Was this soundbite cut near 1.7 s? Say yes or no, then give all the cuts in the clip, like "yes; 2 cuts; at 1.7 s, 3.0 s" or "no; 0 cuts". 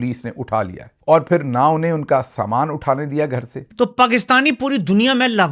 no; 1 cut; at 3.6 s